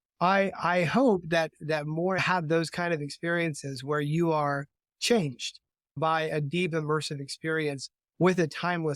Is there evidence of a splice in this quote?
yes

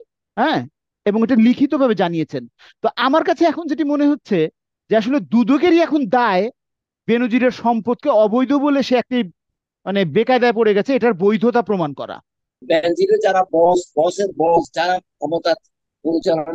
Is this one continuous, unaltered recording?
no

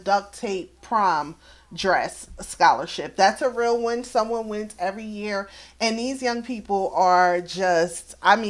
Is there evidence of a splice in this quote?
no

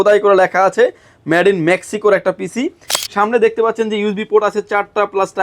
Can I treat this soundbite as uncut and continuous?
no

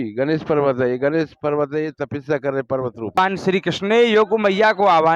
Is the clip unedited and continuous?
no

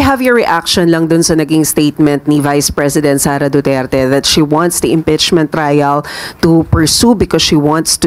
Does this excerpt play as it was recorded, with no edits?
yes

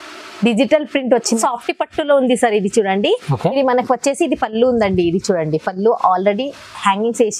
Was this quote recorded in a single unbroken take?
no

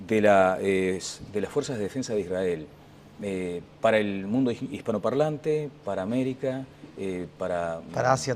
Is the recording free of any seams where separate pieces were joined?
no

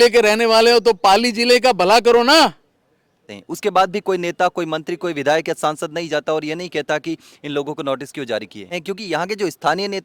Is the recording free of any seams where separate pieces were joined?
no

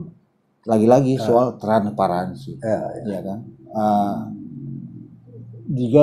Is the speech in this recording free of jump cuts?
yes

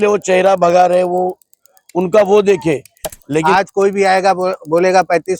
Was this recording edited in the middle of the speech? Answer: yes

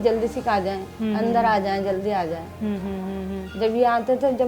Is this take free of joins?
yes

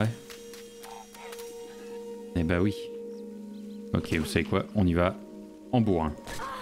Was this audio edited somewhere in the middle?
no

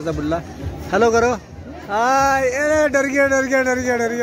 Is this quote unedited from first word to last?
yes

